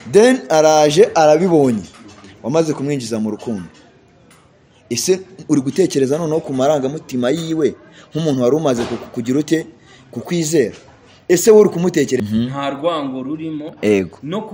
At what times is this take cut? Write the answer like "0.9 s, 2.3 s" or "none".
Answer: 12.2 s